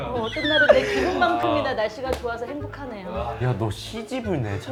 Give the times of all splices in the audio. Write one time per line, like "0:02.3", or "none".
none